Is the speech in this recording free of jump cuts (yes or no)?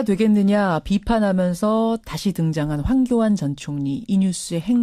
yes